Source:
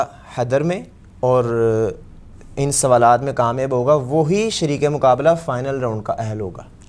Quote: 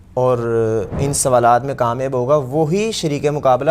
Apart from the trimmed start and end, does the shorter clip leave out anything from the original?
yes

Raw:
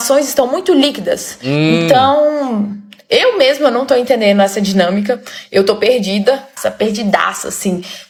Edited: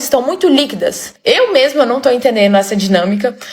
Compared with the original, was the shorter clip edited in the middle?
yes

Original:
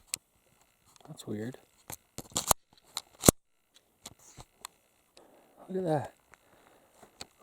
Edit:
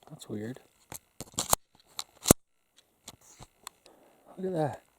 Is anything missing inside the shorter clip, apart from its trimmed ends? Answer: yes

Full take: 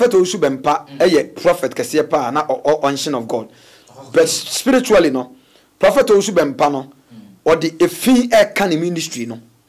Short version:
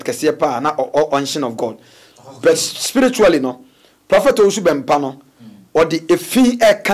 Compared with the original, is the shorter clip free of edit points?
yes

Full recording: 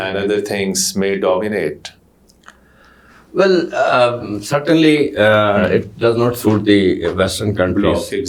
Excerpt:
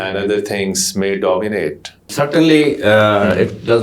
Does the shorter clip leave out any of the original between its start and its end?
yes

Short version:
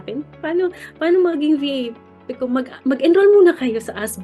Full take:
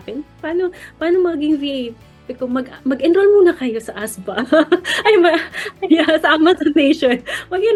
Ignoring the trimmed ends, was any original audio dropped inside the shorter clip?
no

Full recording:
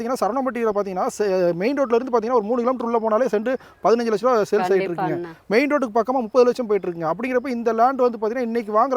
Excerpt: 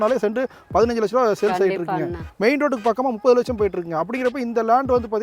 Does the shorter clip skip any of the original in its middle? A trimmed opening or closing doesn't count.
no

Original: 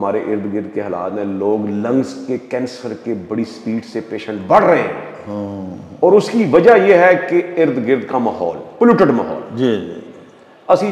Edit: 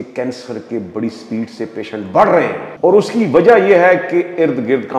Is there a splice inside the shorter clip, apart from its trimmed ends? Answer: yes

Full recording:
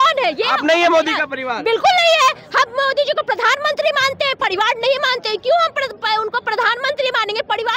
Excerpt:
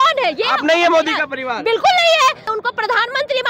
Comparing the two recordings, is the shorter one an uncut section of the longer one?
no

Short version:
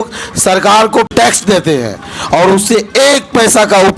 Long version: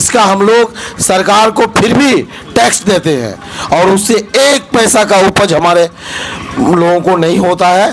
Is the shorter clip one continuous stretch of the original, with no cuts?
no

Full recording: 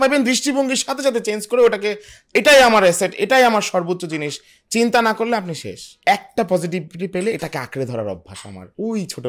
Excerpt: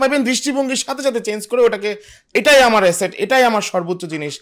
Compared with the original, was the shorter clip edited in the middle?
no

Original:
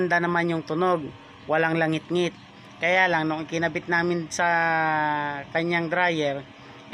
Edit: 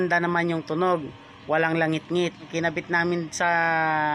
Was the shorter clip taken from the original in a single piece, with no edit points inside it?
no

